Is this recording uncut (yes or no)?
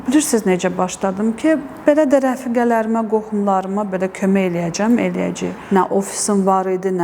no